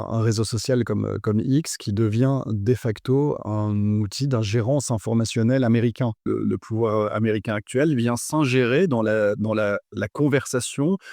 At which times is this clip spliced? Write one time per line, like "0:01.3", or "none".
0:06.2